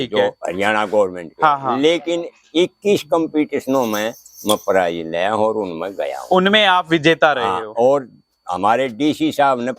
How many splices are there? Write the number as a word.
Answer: zero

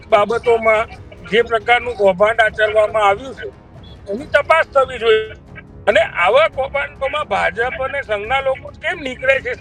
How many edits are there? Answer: zero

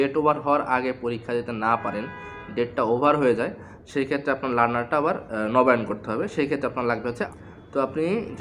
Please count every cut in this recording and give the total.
one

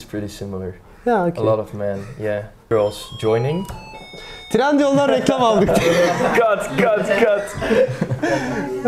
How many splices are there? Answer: one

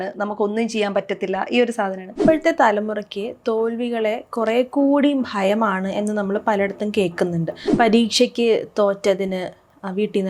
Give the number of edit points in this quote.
two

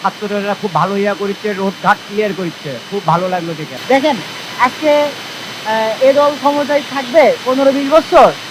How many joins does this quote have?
one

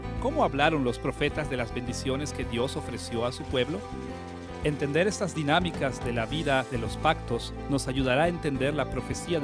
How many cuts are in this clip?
one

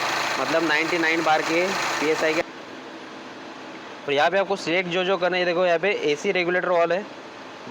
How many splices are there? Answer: one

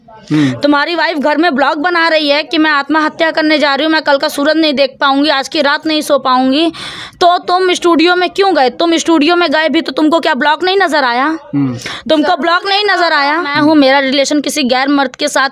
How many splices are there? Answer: one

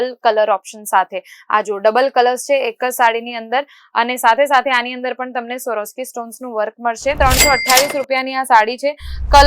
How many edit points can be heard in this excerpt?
one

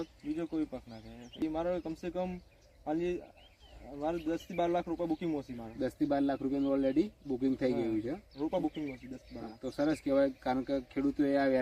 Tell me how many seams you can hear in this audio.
one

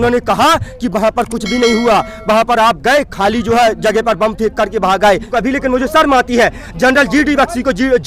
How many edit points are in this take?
one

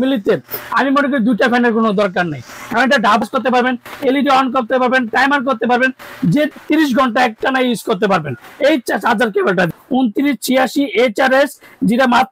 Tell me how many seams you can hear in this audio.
three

